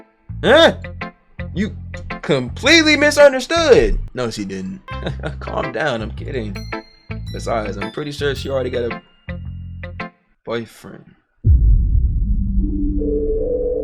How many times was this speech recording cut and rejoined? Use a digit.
0